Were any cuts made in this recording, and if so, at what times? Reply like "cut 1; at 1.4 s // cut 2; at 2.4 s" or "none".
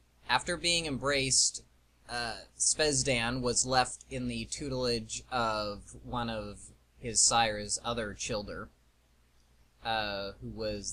none